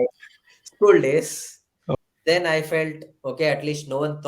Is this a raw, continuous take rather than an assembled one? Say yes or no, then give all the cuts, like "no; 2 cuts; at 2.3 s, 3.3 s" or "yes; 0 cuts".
no; 1 cut; at 1.9 s